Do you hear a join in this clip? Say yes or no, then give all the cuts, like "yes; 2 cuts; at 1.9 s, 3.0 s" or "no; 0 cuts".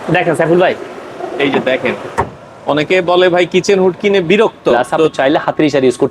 yes; 1 cut; at 5.1 s